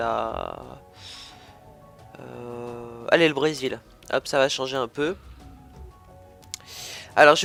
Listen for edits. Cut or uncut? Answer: uncut